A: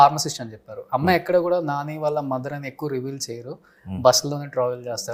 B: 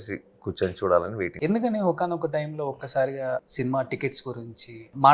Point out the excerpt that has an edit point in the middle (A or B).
B